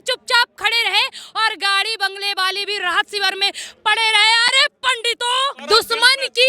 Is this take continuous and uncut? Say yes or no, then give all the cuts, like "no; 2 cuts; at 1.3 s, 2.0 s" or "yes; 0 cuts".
no; 1 cut; at 5.6 s